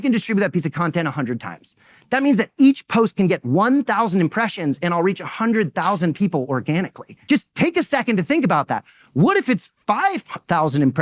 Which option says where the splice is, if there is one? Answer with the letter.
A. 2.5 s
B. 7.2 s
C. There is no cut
B